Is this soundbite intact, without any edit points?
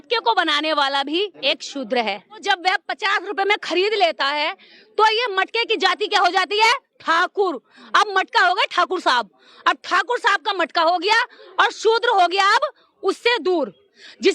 no; 2 cuts; at 1.4 s, 2.4 s

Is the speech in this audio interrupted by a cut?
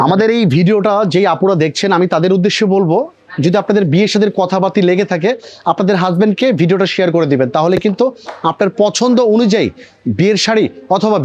no; 0 cuts

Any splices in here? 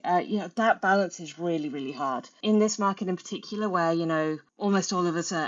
yes; 2 cuts; at 2.4 s, 4.5 s

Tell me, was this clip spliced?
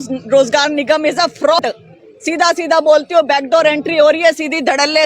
yes; 1 cut; at 1.6 s

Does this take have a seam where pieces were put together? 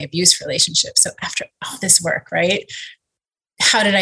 no; 0 cuts

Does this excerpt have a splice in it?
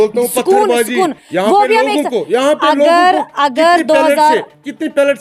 no; 0 cuts

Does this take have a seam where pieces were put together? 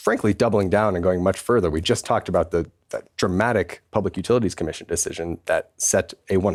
no; 0 cuts

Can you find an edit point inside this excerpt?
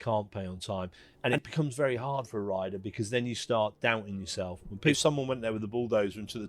yes; 2 cuts; at 1.0 s, 5.0 s

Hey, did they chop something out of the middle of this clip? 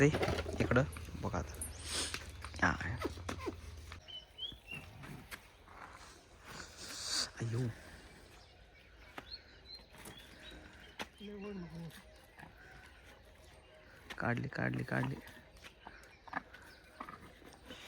yes; 1 cut; at 4.1 s

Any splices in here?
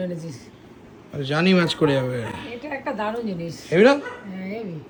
no; 0 cuts

